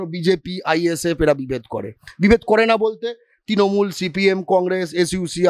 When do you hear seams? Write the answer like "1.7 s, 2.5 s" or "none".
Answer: none